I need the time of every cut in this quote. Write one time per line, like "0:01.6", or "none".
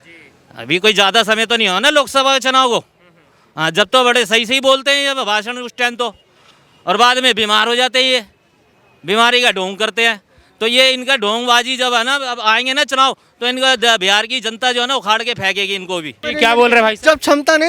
0:16.2